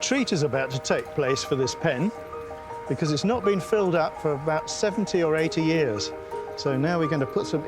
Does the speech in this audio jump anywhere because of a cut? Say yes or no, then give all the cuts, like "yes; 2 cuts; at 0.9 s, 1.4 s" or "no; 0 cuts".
no; 0 cuts